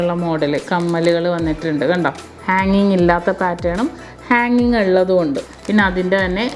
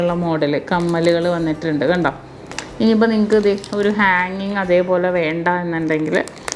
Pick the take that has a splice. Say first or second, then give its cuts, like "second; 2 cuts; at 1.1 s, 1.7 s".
first; 2 cuts; at 2.3 s, 5.5 s